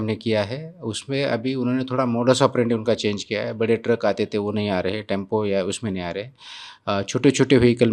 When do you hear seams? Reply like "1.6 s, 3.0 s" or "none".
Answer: none